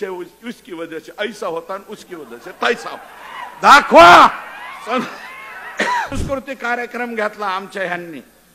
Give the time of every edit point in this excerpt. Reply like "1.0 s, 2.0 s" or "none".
6.2 s

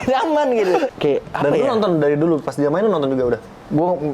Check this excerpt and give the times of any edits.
0.9 s

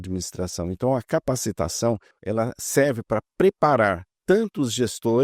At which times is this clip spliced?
2.1 s, 4.1 s

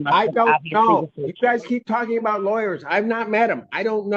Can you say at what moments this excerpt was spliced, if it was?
none

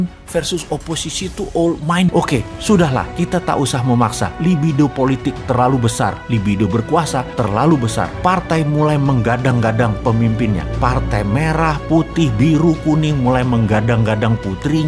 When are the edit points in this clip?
2.1 s

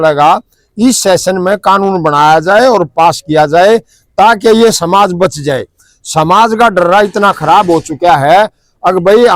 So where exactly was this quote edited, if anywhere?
none

